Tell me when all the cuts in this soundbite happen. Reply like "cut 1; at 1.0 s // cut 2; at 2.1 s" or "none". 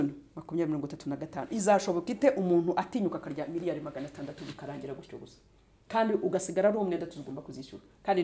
none